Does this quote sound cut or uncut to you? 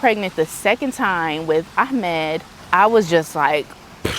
cut